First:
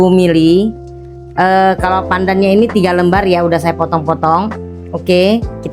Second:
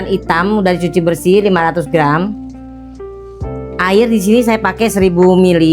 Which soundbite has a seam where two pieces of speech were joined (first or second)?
second